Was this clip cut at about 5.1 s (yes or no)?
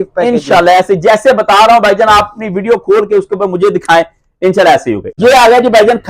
yes